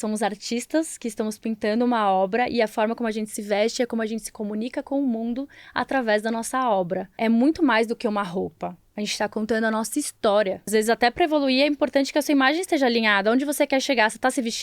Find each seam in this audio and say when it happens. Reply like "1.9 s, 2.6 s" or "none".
7.1 s, 10.7 s

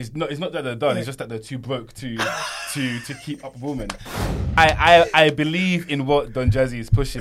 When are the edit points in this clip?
4.3 s

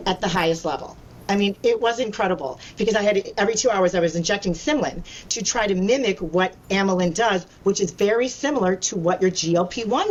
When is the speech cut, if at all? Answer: none

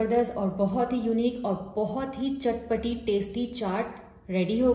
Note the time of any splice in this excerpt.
none

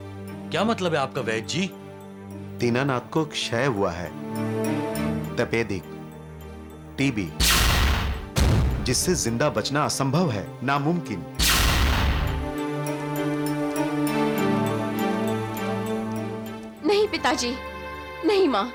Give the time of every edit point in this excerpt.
none

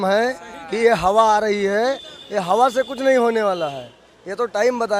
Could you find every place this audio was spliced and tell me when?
none

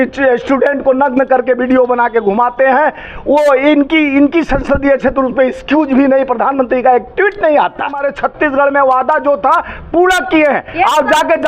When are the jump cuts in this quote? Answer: 8.1 s

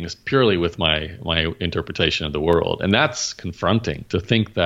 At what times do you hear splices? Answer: none

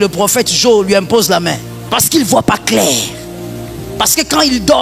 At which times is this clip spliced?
1.7 s

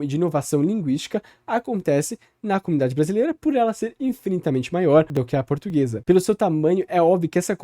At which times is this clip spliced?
5.2 s

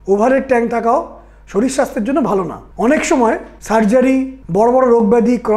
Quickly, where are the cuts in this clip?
2.6 s, 3.5 s, 4.4 s

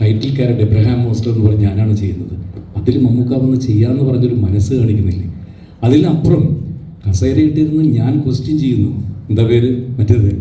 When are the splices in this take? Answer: none

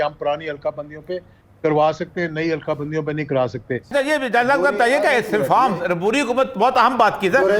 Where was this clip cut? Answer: 3.9 s

